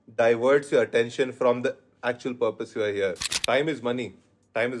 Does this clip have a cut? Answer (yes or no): yes